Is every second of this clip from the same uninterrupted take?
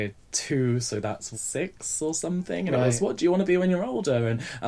no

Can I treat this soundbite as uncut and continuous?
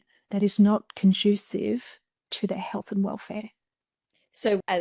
no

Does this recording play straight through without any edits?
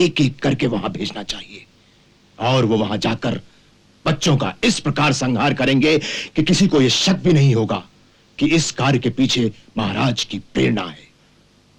yes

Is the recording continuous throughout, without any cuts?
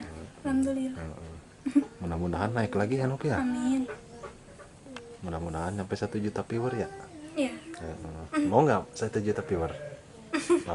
yes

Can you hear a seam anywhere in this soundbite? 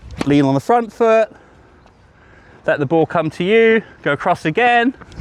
no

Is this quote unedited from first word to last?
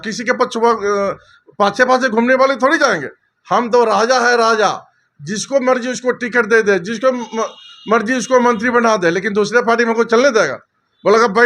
yes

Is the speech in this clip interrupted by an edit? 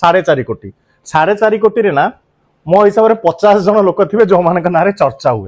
no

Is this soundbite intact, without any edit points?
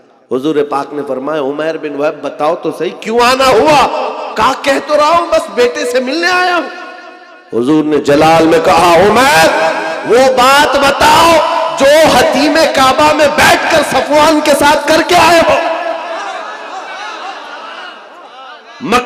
yes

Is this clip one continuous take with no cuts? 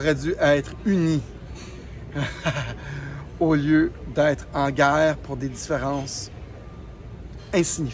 yes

